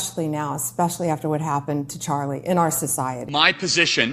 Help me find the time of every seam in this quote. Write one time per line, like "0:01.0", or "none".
0:03.2